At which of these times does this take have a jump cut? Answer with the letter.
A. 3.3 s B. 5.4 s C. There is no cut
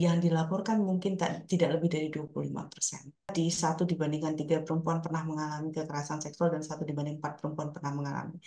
A